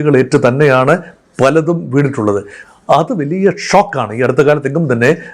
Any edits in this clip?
no; 0 cuts

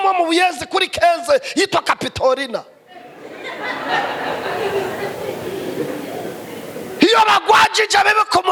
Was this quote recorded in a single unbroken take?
yes; 0 cuts

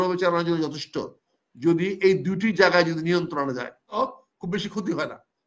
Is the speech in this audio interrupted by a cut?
yes; 1 cut; at 4.0 s

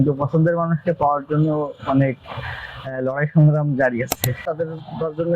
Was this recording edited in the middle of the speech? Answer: yes; 1 cut; at 4.4 s

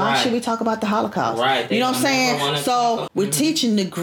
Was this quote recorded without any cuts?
no; 1 cut; at 3.0 s

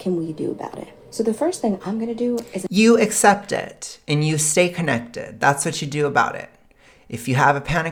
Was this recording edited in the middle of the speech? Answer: no; 0 cuts

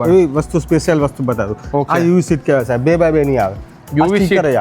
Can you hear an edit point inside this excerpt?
no; 0 cuts

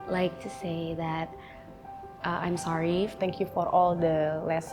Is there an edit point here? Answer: yes; 1 cut; at 3.1 s

